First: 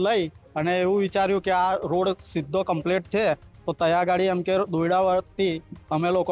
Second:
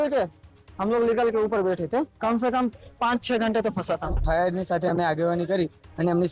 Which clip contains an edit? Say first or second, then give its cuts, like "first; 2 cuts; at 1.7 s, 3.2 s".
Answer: second; 2 cuts; at 2.1 s, 4.2 s